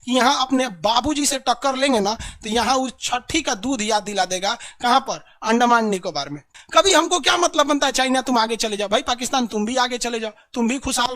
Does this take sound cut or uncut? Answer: cut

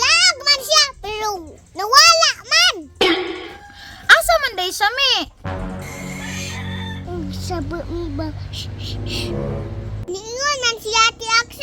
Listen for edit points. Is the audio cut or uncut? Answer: uncut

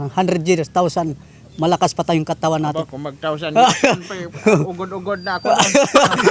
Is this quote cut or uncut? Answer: uncut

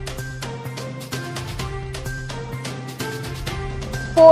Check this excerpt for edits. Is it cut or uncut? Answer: cut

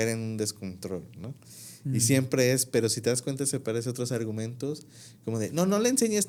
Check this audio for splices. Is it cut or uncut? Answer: uncut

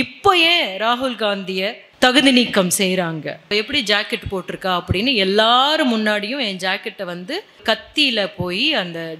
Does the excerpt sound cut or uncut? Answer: cut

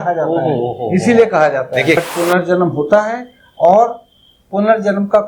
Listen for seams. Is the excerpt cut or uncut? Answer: cut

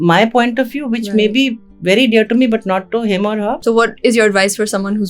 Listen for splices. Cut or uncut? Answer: cut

